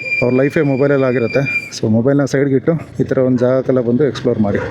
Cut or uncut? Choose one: cut